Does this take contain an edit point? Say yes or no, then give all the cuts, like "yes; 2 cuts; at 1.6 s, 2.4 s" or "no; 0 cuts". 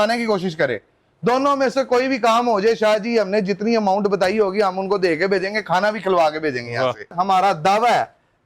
yes; 1 cut; at 7.1 s